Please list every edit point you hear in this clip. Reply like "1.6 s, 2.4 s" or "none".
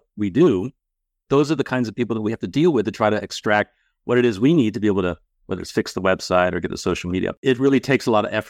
7.4 s